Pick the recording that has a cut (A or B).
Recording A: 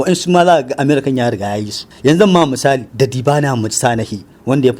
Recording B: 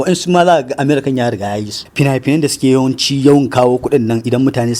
B